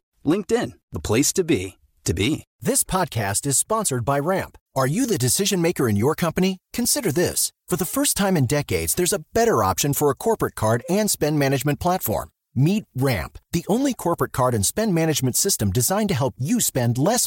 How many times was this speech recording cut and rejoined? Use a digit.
1